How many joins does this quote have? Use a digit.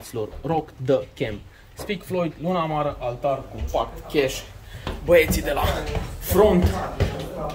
0